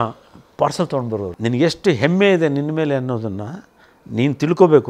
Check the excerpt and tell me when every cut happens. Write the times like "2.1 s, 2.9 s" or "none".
1.3 s